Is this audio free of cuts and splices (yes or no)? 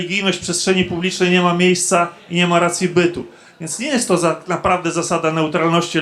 yes